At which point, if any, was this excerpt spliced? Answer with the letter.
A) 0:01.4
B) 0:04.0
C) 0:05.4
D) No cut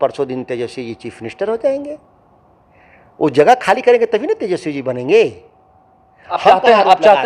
D